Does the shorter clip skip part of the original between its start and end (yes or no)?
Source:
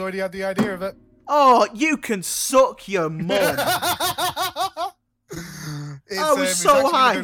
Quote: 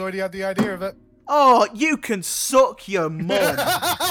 no